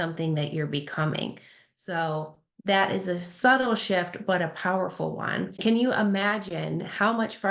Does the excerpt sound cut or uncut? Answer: cut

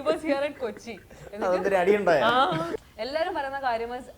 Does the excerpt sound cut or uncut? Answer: cut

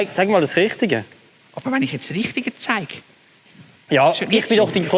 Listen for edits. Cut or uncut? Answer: uncut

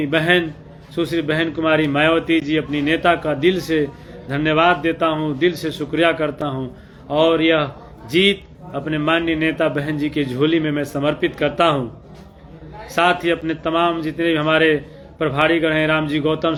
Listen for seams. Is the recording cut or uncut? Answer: uncut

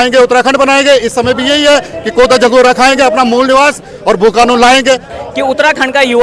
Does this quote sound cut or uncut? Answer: cut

